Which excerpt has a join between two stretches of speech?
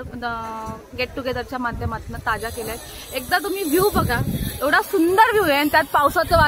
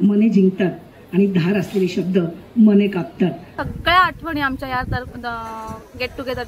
second; 1 cut; at 3.5 s

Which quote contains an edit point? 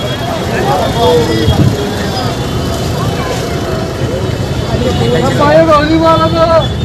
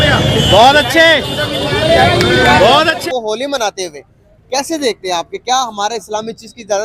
second; 1 cut; at 3.0 s

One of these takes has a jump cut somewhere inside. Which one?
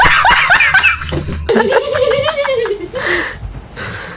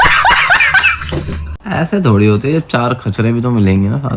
second; 1 cut; at 1.5 s

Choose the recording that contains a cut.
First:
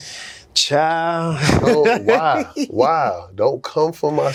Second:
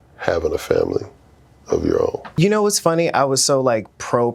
second; 1 cut; at 2.4 s

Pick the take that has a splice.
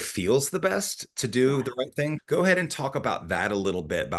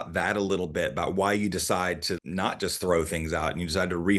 first; 1 cut; at 2.2 s

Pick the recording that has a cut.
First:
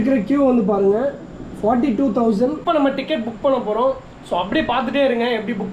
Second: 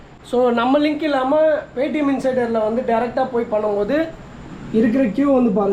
first; 1 cut; at 2.6 s

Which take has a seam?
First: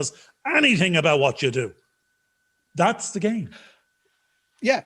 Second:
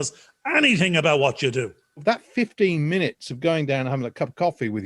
second; 1 cut; at 2.0 s

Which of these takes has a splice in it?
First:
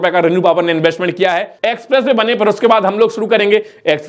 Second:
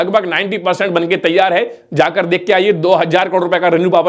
first; 1 cut; at 1.5 s

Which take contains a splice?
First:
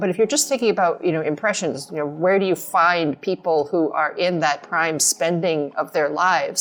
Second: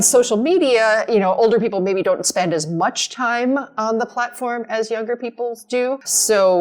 second; 1 cut; at 5.7 s

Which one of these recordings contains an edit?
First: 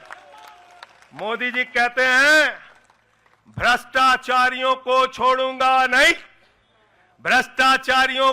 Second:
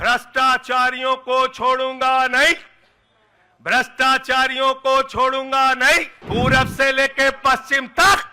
second; 1 cut; at 6.1 s

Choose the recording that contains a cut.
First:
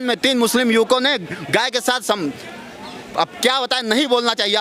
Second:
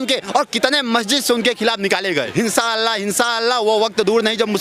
second; 1 cut; at 2.3 s

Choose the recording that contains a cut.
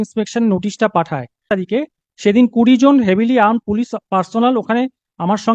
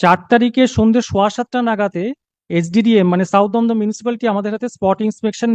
first; 1 cut; at 1.4 s

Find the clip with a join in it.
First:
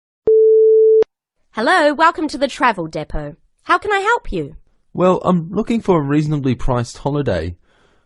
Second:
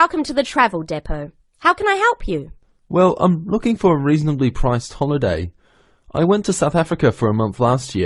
first; 1 cut; at 1.0 s

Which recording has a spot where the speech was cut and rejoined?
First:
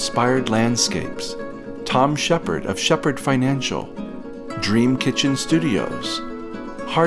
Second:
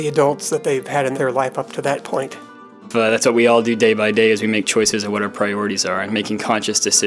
second; 2 cuts; at 1.1 s, 2.9 s

